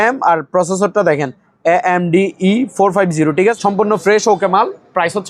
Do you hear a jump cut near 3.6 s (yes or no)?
yes